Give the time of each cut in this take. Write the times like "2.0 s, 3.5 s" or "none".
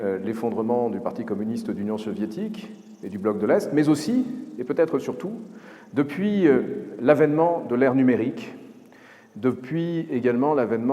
none